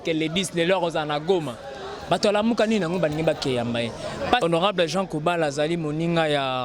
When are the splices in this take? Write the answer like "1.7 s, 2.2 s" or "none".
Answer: 4.4 s